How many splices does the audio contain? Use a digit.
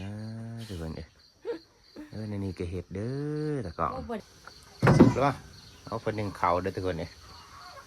1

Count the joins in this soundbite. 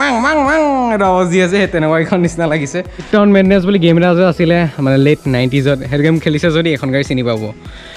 1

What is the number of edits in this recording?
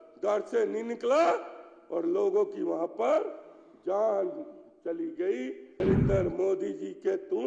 1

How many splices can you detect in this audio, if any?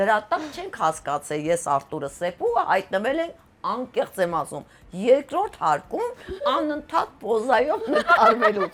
0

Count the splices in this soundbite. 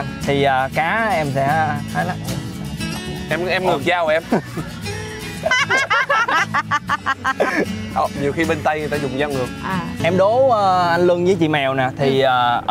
1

